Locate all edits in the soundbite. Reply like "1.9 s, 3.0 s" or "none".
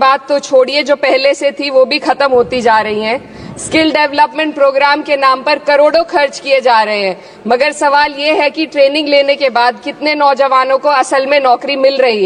none